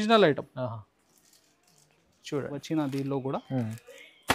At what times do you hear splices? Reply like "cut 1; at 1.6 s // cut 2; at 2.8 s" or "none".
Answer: cut 1; at 2.6 s